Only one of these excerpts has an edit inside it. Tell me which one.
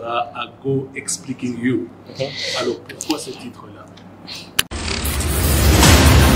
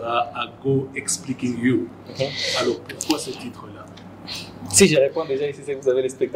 first; 1 cut; at 4.5 s

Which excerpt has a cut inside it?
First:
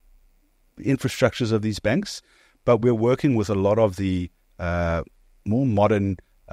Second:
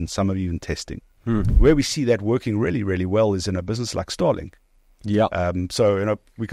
second; 1 cut; at 1.5 s

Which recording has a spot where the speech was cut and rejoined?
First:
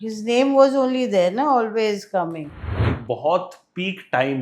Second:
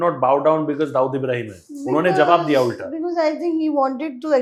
first; 1 cut; at 2.8 s

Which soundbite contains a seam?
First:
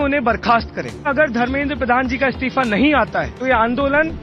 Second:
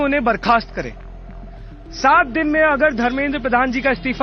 first; 2 cuts; at 1.1 s, 3.3 s

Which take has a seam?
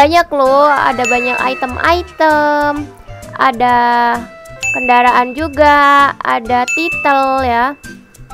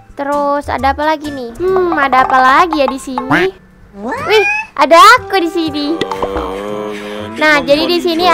second; 1 cut; at 1.6 s

